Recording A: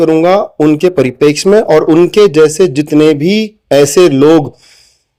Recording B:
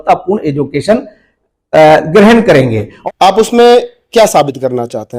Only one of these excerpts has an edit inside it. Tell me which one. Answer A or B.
B